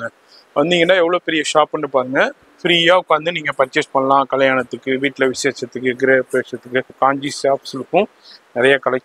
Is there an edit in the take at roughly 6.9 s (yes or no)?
yes